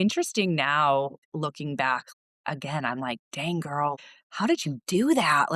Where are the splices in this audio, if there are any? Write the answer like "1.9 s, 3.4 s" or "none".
1.2 s, 2.1 s, 4.0 s